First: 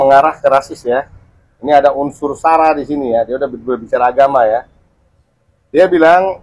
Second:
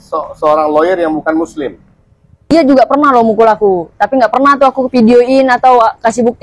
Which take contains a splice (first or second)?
second